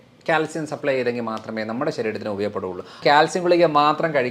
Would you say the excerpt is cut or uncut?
cut